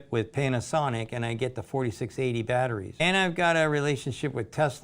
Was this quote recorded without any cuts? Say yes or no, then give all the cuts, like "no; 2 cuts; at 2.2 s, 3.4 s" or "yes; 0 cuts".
no; 1 cut; at 2.9 s